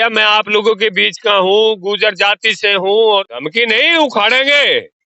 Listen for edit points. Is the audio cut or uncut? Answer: cut